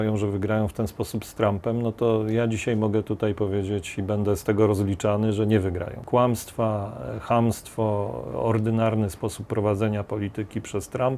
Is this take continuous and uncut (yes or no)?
no